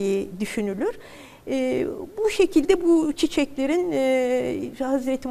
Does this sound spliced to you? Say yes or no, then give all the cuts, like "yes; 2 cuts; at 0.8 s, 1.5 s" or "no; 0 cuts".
no; 0 cuts